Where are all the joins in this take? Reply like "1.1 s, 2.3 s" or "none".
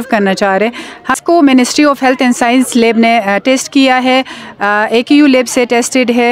1.1 s